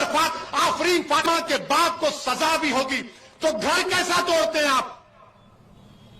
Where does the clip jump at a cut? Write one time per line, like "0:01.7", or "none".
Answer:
0:01.3